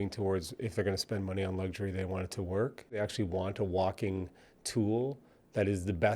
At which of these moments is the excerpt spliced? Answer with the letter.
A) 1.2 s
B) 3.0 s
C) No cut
B